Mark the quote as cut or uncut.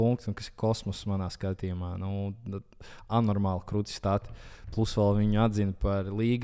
uncut